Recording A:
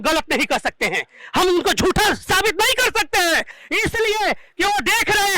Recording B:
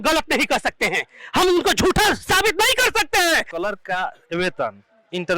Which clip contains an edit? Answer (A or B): B